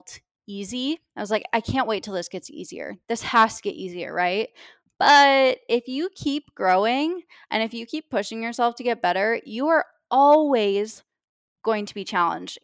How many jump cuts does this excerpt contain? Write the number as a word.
one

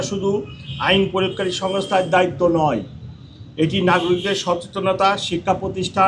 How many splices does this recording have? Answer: zero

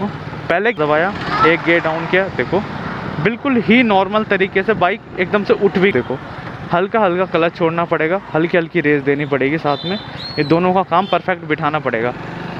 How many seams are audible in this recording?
two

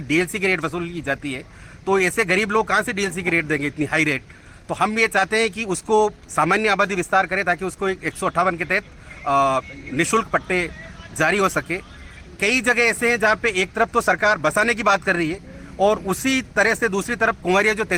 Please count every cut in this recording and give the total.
zero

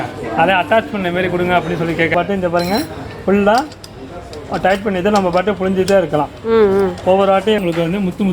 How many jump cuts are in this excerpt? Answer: two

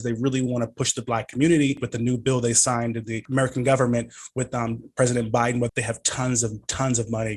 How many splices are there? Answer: three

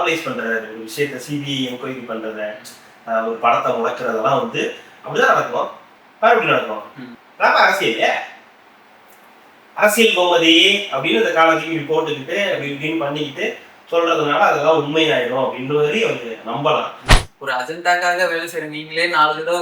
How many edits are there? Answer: one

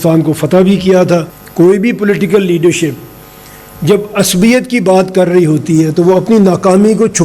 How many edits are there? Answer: one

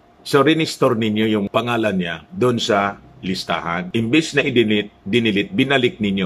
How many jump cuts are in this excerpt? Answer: two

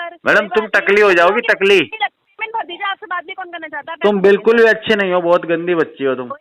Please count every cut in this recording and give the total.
one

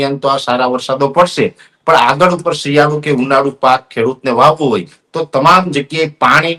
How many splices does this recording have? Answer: zero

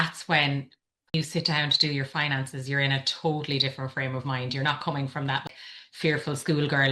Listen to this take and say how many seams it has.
two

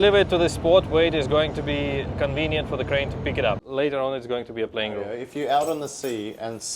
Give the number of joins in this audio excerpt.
two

